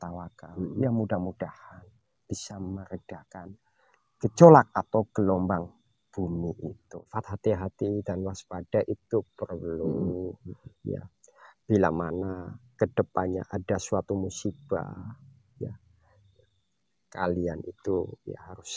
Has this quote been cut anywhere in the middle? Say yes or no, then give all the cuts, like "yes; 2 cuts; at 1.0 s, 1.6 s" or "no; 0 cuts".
yes; 1 cut; at 7.1 s